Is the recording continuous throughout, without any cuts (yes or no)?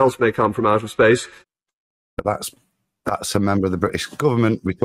no